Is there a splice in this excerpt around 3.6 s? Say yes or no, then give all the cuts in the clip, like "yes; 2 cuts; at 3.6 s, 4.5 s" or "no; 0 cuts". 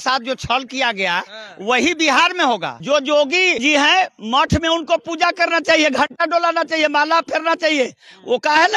yes; 2 cuts; at 2.7 s, 3.6 s